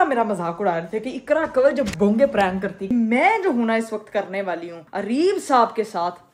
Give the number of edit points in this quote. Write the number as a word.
one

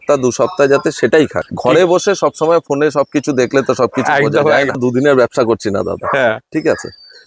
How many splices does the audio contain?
two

